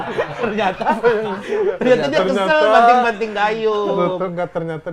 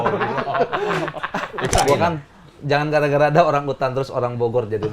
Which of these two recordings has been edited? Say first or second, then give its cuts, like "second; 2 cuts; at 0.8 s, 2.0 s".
second; 1 cut; at 1.7 s